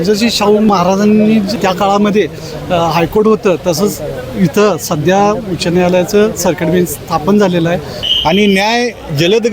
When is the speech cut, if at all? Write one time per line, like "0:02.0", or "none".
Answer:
0:00.7
0:01.5
0:08.0